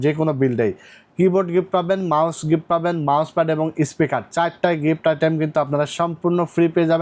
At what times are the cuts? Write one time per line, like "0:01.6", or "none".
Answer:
none